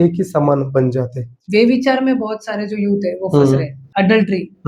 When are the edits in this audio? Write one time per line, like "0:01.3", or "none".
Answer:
0:01.4
0:03.8